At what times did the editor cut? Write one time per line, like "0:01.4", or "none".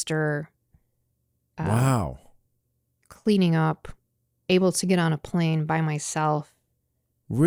none

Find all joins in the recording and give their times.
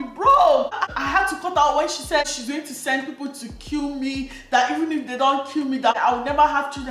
0:00.9
0:02.3
0:06.0

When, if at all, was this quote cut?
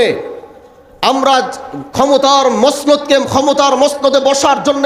none

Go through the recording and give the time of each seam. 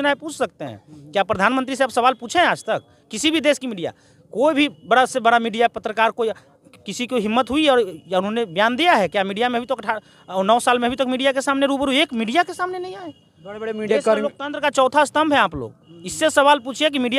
none

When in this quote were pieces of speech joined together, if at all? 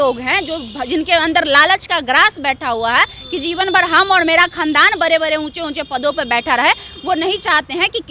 none

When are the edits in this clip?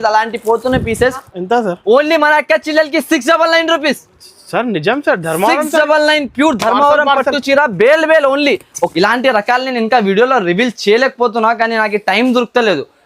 0:01.3
0:08.9

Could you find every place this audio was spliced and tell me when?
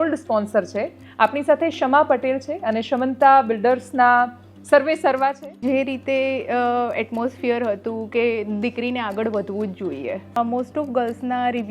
0:01.0
0:05.6
0:10.4

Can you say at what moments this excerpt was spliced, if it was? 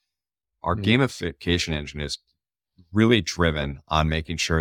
none

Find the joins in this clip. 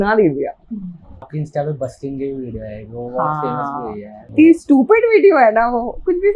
0:01.3
0:04.1

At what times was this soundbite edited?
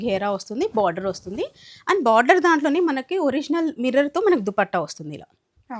none

